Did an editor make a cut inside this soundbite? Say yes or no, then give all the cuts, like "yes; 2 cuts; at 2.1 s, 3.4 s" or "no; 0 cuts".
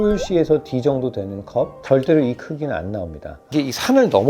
yes; 2 cuts; at 1.8 s, 3.4 s